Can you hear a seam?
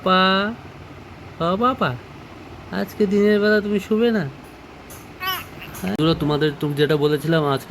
yes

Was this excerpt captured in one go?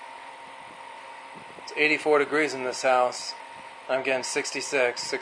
yes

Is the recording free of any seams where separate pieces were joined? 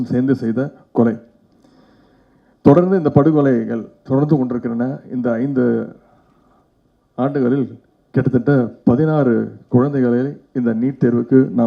yes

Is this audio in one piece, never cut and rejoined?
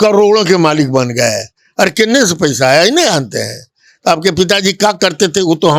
yes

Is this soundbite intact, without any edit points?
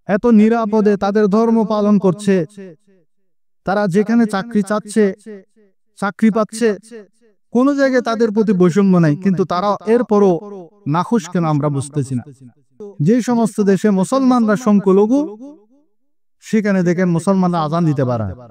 no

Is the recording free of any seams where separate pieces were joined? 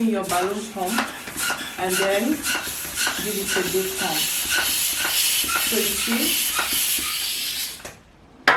yes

